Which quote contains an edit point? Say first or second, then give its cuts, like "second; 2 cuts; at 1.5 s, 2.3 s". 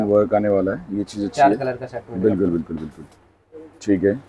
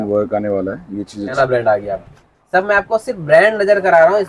second; 1 cut; at 1.3 s